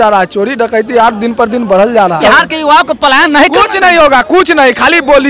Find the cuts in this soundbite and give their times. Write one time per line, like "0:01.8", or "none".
0:02.2

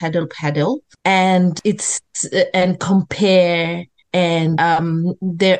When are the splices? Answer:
0:01.6
0:04.5

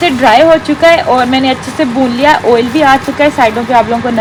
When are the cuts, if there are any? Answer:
none

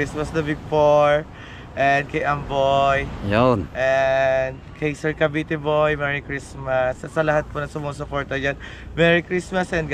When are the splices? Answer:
none

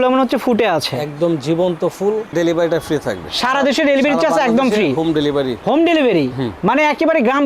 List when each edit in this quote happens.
0:02.3

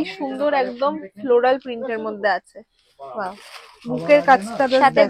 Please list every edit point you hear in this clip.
none

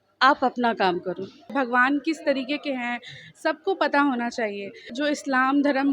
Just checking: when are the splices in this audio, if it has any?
0:01.5
0:04.9

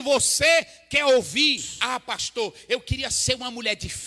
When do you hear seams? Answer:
0:01.7

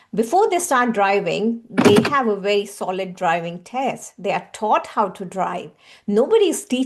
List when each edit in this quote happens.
none

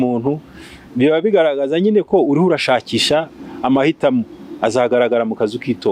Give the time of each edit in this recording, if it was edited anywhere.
none

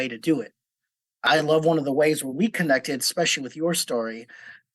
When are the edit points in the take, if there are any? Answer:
0:01.2

